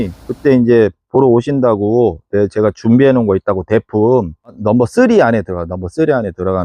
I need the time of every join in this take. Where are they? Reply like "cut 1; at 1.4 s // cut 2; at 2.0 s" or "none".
cut 1; at 4.6 s